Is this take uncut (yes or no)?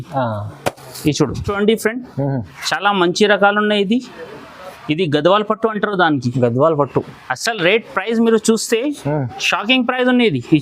no